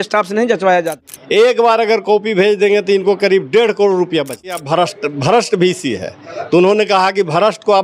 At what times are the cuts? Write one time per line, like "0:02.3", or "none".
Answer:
0:00.9
0:04.6